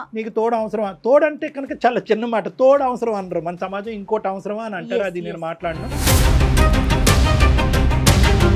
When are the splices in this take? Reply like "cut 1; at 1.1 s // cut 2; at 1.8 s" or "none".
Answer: none